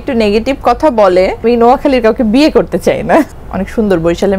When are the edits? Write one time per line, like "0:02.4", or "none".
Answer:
0:01.4
0:03.4